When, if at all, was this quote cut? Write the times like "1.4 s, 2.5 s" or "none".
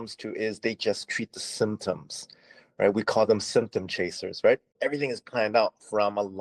4.7 s